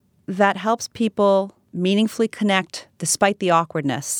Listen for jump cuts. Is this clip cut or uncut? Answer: cut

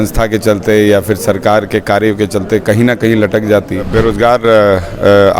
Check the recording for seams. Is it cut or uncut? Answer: cut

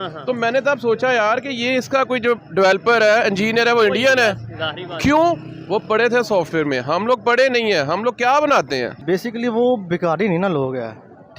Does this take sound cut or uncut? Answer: cut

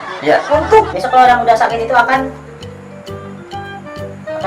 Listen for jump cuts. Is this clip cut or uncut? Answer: cut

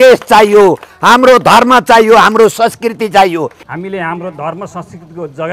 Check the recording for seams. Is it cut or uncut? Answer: cut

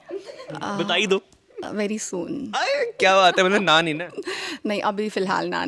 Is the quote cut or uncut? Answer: uncut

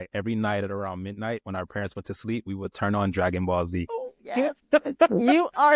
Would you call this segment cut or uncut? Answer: uncut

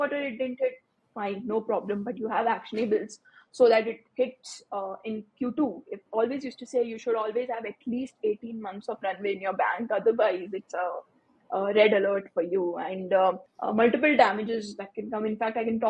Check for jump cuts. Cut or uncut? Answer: cut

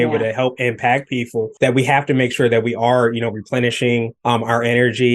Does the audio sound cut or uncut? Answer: cut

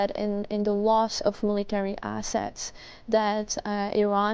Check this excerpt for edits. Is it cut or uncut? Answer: uncut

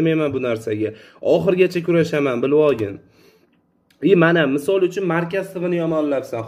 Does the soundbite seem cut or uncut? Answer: uncut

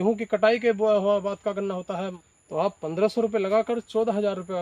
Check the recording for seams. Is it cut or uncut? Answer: cut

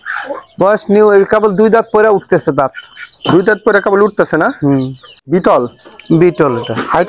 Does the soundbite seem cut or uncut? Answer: cut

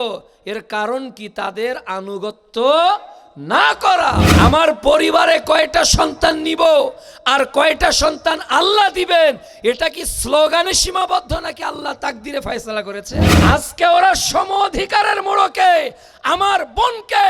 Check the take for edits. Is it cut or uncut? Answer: cut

